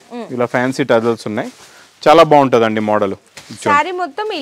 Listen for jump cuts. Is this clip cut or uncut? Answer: uncut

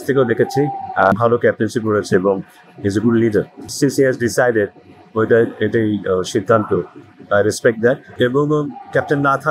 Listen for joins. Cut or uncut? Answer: cut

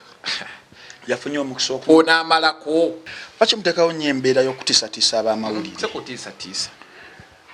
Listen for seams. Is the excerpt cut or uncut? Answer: cut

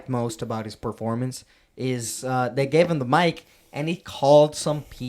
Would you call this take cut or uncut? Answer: uncut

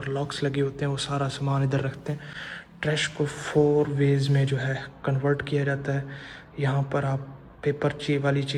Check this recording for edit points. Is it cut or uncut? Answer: uncut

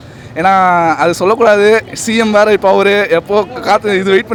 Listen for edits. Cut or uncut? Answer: uncut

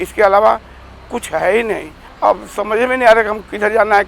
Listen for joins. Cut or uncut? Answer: cut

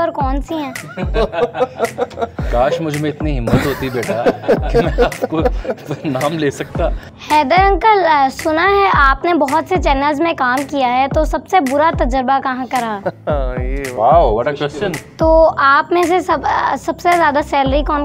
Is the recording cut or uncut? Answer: cut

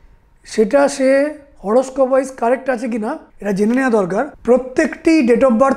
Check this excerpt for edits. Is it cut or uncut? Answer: cut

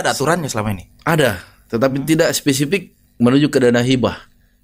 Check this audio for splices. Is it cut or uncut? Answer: uncut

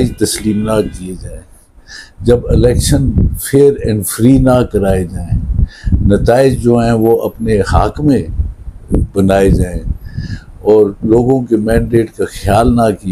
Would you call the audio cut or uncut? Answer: uncut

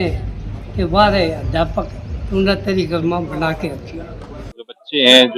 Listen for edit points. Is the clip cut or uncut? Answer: cut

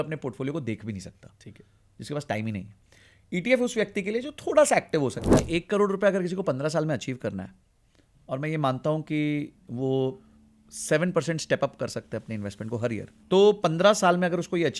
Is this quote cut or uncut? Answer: cut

